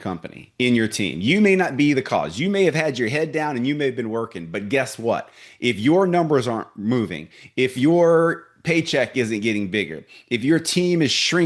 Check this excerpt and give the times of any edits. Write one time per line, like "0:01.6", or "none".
none